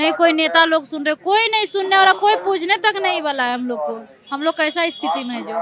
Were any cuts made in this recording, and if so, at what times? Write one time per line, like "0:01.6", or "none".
none